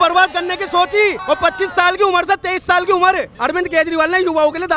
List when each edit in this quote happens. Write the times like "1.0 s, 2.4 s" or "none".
1.2 s, 3.3 s